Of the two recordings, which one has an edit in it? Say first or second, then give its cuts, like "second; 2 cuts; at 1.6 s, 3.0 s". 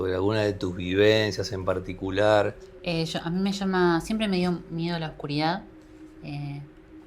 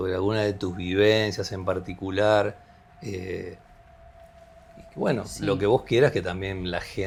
first; 1 cut; at 2.7 s